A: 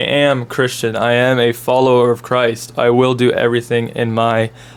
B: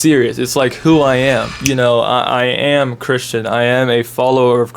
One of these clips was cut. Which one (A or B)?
B